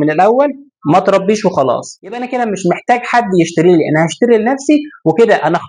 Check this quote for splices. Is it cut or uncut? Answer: cut